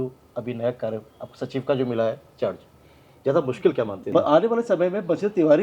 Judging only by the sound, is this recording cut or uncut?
cut